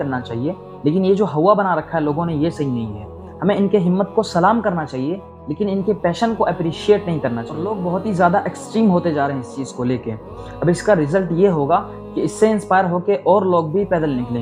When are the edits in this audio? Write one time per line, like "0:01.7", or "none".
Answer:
0:07.6